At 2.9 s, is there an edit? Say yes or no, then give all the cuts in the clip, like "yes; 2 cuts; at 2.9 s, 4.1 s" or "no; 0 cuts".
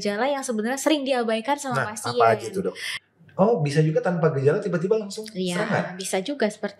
yes; 1 cut; at 2.9 s